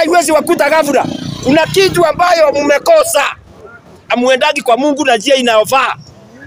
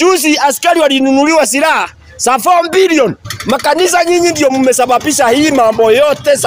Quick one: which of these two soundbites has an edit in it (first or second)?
second